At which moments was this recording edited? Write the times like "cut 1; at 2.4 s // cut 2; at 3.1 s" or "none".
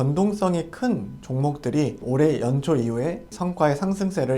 cut 1; at 2.0 s // cut 2; at 3.3 s